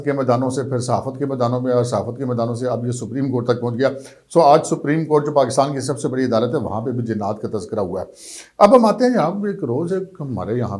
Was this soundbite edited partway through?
no; 0 cuts

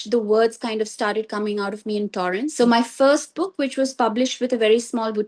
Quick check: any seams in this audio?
yes; 1 cut; at 2.4 s

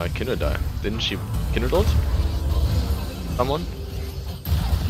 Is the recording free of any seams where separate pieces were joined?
yes; 0 cuts

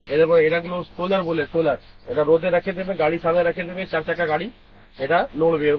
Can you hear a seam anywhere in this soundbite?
no; 0 cuts

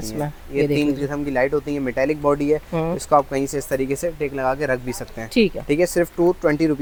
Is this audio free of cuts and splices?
yes; 0 cuts

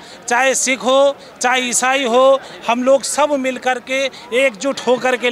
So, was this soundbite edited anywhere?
no; 0 cuts

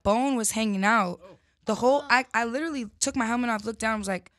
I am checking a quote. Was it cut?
no; 0 cuts

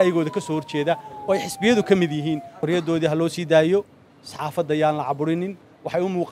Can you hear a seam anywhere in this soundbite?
yes; 1 cut; at 2.5 s

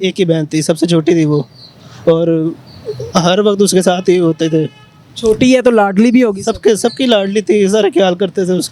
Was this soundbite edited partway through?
no; 0 cuts

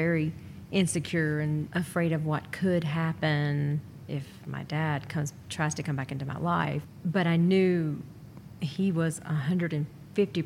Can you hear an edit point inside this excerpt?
yes; 2 cuts; at 1.7 s, 6.8 s

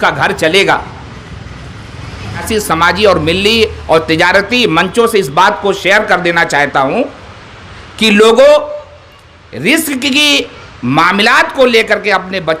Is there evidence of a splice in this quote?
yes; 1 cut; at 2.5 s

